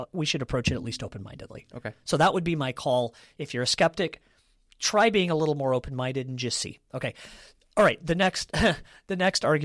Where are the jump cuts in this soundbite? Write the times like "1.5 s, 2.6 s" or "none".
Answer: none